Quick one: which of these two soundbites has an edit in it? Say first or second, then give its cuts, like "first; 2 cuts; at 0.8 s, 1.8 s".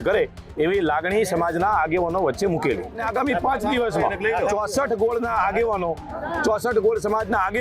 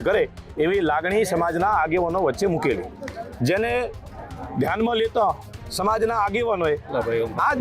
first; 1 cut; at 3.0 s